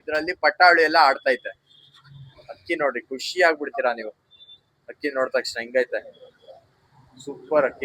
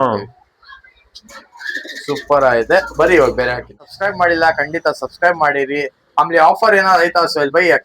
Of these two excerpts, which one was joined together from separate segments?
second; 1 cut; at 3.9 s

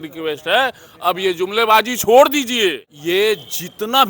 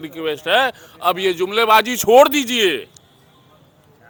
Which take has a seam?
first; 1 cut; at 2.9 s

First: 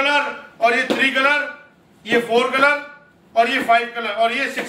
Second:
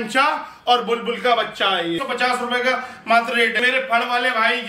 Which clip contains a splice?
second; 2 cuts; at 2.0 s, 3.6 s

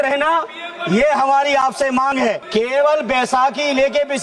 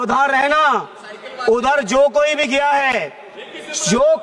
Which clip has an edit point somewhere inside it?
first; 1 cut; at 2.4 s

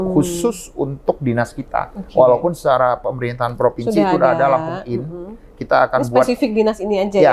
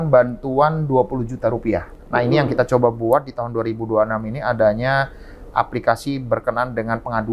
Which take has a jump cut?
second; 1 cut; at 1.9 s

